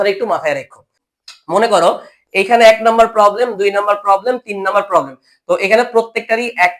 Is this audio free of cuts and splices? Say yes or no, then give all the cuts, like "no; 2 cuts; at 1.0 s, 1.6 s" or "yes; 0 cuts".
no; 1 cut; at 1.0 s